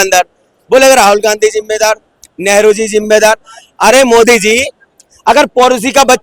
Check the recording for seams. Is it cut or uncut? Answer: uncut